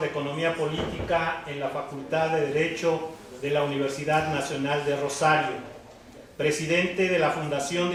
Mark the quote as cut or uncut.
uncut